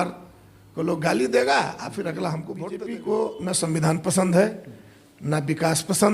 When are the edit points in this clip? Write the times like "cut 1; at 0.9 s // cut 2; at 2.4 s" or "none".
cut 1; at 2.9 s